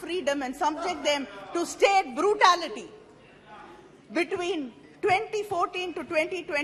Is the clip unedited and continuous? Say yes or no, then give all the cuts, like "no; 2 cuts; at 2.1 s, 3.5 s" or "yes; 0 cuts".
yes; 0 cuts